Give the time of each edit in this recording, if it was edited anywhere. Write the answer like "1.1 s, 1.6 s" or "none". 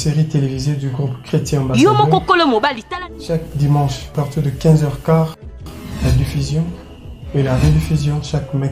2.8 s